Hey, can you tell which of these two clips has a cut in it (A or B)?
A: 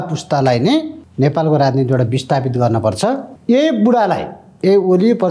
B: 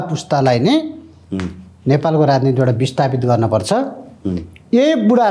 A